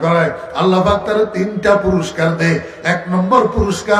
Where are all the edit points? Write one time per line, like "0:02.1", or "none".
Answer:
none